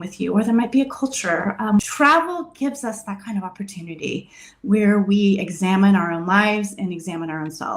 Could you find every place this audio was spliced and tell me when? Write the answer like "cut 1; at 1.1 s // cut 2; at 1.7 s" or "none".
cut 1; at 1.8 s